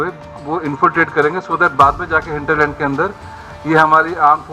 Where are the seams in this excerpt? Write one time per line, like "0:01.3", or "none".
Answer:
none